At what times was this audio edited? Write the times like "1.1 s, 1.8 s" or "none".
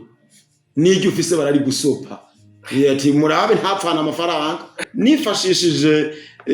4.8 s